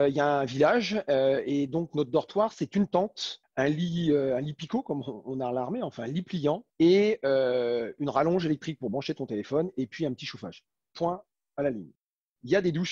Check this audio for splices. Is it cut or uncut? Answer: uncut